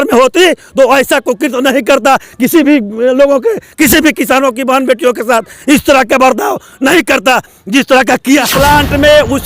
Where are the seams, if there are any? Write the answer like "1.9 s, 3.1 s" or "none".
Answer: 8.5 s